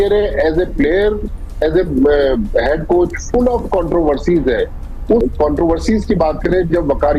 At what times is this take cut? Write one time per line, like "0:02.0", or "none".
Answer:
none